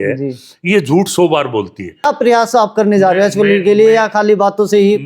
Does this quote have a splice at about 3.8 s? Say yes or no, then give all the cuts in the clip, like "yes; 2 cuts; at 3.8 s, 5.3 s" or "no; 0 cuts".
no; 1 cut; at 2.1 s